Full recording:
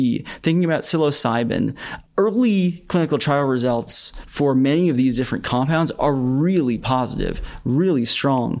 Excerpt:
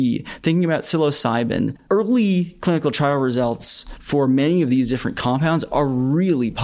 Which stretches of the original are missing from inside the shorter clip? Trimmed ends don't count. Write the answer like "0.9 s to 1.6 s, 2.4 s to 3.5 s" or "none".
1.8 s to 2.0 s